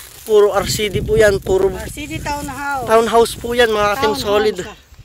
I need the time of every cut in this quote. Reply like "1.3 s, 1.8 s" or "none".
none